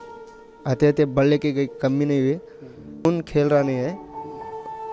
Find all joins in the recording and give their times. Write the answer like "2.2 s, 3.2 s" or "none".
3.1 s

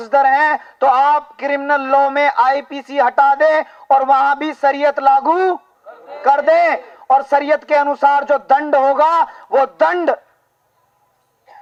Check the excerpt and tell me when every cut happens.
none

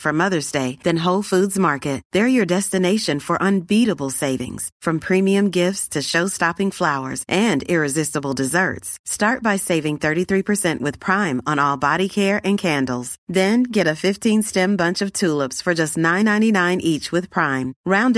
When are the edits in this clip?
none

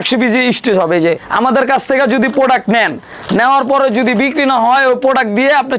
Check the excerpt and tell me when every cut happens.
1.3 s

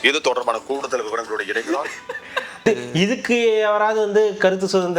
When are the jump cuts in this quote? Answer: 2.6 s

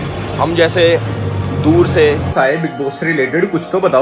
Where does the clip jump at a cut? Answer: 2.3 s

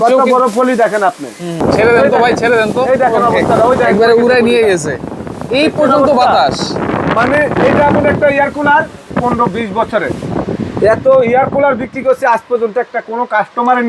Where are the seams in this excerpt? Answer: 1.6 s, 9.1 s

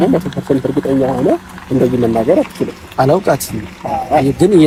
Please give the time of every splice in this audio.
none

